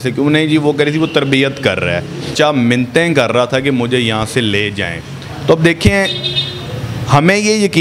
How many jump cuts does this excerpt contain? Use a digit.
1